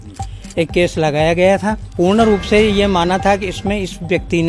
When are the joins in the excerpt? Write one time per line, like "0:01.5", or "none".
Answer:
0:01.8